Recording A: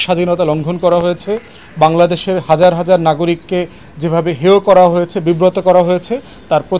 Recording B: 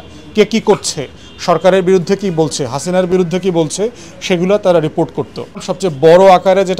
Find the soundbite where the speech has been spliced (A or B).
B